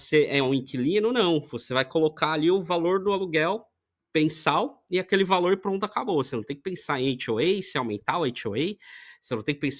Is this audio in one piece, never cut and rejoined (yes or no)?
yes